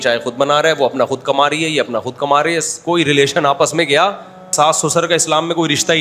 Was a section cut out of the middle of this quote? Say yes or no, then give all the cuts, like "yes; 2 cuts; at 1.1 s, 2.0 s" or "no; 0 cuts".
yes; 1 cut; at 4.5 s